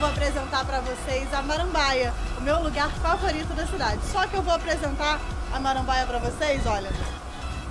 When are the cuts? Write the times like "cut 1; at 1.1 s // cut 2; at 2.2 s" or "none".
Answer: none